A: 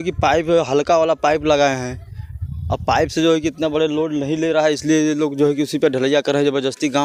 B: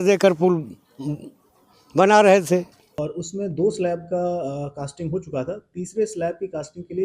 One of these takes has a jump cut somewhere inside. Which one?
B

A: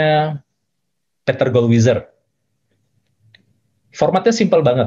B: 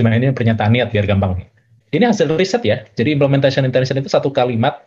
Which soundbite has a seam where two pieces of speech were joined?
B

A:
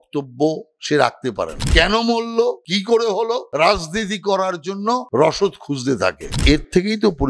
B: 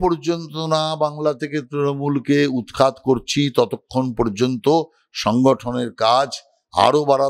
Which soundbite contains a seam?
A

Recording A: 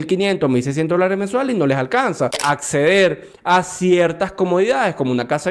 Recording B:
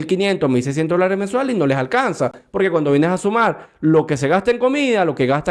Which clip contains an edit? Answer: A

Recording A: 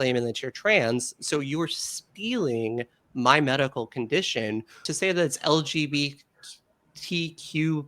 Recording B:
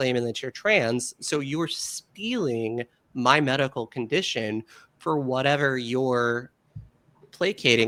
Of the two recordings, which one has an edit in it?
A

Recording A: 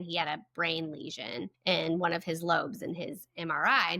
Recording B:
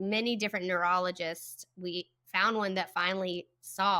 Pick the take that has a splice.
A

